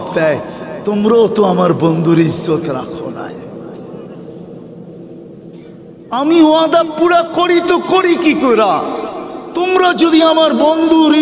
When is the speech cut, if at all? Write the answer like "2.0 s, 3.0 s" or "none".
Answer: none